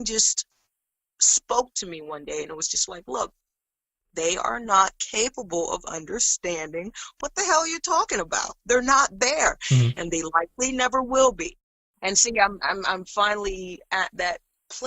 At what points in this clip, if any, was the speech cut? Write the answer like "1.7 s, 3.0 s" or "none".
12.0 s